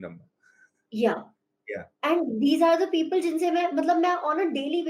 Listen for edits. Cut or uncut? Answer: uncut